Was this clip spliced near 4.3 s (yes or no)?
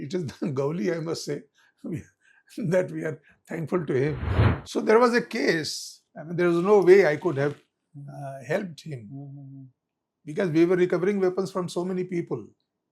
yes